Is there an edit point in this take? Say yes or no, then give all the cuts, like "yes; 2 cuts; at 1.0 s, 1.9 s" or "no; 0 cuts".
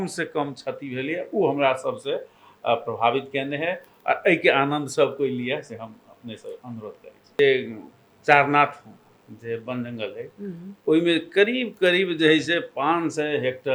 yes; 1 cut; at 7.3 s